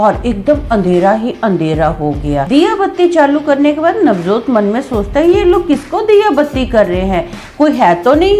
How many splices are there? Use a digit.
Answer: 1